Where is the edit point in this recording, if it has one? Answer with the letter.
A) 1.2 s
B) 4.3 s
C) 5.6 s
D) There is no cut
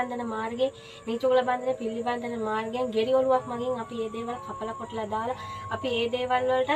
D